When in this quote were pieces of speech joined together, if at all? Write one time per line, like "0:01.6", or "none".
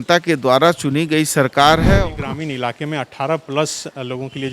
0:02.0

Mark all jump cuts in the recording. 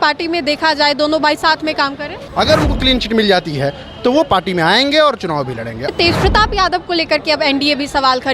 0:02.2
0:05.9

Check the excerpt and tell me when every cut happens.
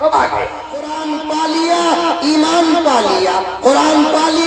0:01.0

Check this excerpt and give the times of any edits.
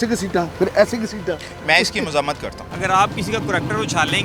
0:02.6

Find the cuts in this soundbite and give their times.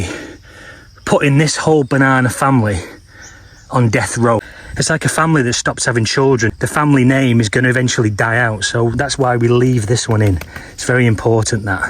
0:04.6
0:06.6

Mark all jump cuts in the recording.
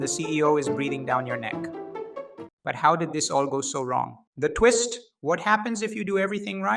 0:04.2

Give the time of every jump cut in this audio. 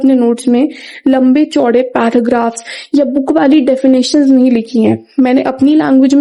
none

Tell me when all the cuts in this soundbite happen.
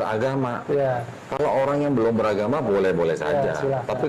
0:01.1

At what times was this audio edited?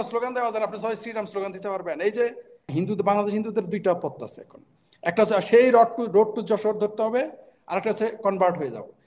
0:02.6

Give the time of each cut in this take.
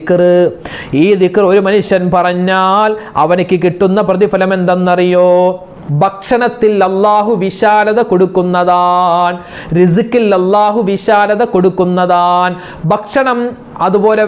none

